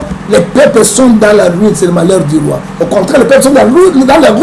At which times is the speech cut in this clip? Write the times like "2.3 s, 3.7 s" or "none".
none

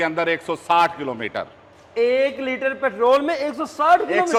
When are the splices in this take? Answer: none

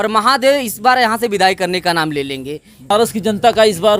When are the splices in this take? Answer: 2.9 s

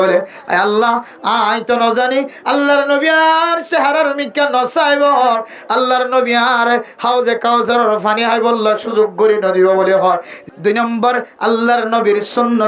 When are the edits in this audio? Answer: 10.4 s

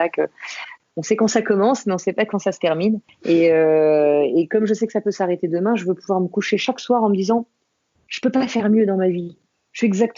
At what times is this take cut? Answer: 0.8 s, 3.1 s

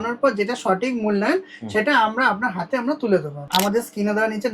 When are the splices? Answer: 3.4 s

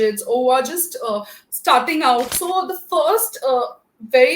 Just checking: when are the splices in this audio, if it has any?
2.3 s

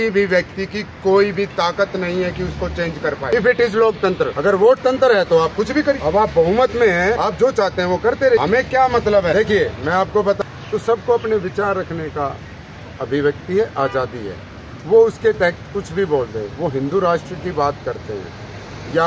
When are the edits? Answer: 3.3 s, 4.3 s, 6.0 s, 7.2 s, 8.4 s, 9.3 s, 10.4 s

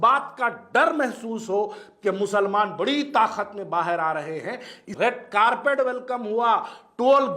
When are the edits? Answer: 4.8 s

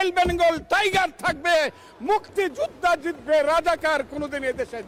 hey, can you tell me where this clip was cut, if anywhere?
none

